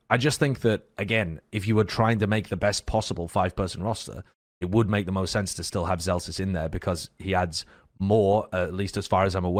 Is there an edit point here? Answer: no; 0 cuts

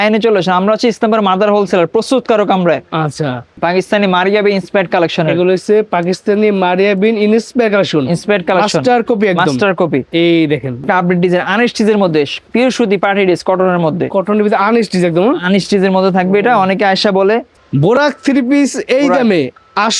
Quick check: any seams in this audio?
yes; 4 cuts; at 3.5 s, 10.8 s, 12.4 s, 17.6 s

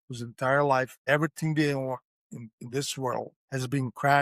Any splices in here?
yes; 2 cuts; at 1.0 s, 3.4 s

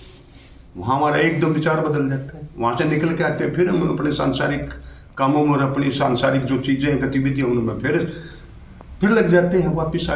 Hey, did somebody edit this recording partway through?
no; 0 cuts

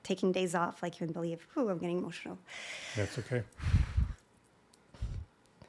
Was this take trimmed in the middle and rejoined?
no; 0 cuts

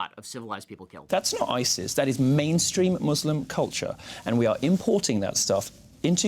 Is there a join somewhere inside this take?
yes; 1 cut; at 0.9 s

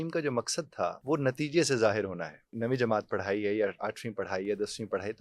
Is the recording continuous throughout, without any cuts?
no; 2 cuts; at 1.0 s, 2.5 s

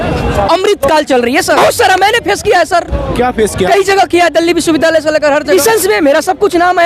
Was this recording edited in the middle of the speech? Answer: yes; 2 cuts; at 1.6 s, 5.5 s

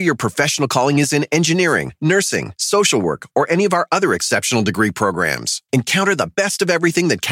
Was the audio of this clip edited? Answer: no; 0 cuts

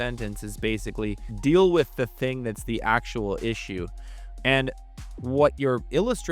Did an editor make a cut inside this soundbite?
no; 0 cuts

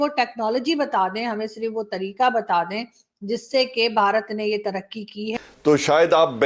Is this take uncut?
no; 1 cut; at 5.3 s

